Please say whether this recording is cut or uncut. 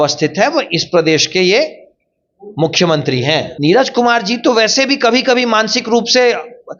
cut